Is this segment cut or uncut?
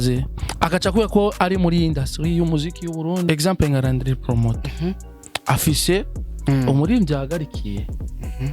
cut